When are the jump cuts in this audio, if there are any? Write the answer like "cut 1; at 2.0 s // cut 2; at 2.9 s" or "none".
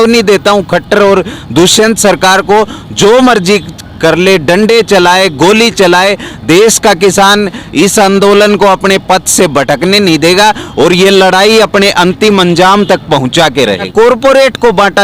cut 1; at 13.9 s